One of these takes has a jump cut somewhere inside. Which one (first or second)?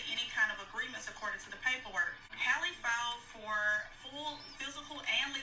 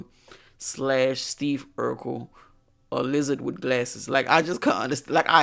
first